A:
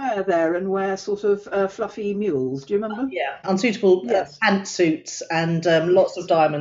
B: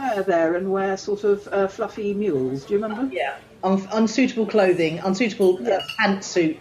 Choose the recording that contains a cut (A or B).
A